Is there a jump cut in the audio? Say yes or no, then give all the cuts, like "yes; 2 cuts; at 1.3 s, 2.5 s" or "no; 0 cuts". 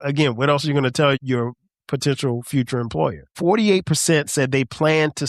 yes; 2 cuts; at 1.2 s, 3.3 s